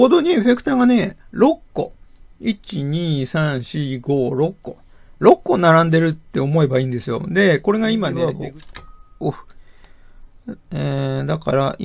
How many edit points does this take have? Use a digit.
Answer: 1